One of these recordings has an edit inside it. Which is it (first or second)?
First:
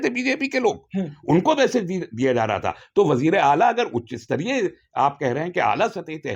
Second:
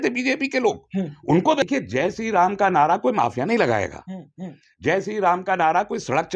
second